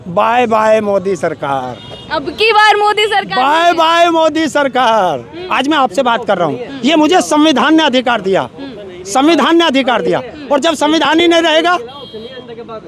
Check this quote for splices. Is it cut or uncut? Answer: cut